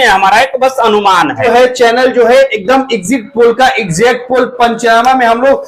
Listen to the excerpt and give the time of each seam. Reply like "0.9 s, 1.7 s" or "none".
1.4 s